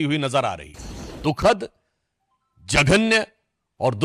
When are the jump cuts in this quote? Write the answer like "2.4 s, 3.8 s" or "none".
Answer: 1.1 s

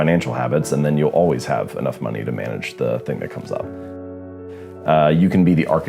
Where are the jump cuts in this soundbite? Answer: 4.2 s

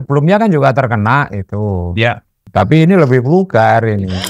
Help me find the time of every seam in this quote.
2.3 s

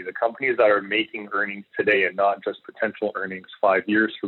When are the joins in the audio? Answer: 1.9 s

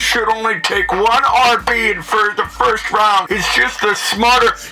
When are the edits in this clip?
3.3 s

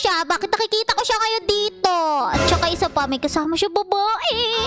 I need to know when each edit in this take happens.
none

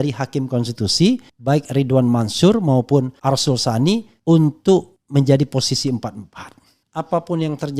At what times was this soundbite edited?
1.3 s, 3.1 s, 4.1 s, 5.0 s, 6.9 s

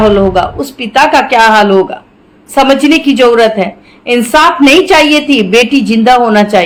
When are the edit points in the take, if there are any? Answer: none

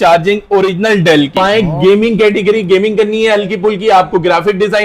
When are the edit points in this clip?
1.4 s

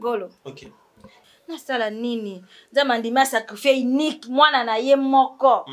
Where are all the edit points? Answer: 1.1 s

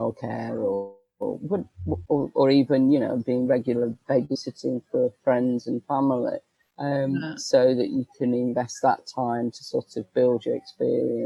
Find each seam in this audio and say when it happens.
none

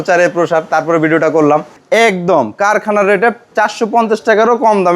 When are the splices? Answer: 1.8 s, 3.4 s

